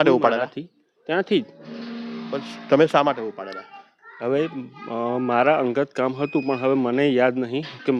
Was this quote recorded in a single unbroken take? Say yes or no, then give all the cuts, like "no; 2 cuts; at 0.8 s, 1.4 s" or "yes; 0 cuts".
yes; 0 cuts